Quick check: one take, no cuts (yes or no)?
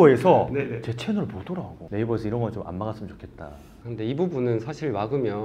no